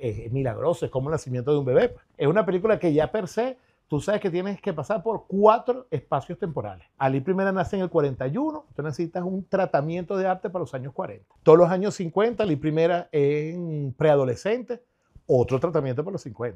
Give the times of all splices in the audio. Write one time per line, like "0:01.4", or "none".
0:02.1